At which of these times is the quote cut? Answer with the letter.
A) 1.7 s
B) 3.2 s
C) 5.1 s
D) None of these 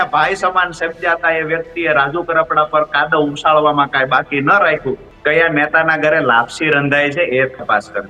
C